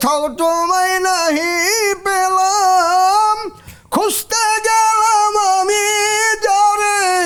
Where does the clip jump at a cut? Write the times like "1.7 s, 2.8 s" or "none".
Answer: none